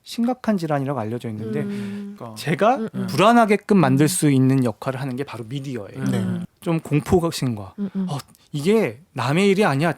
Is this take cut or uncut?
cut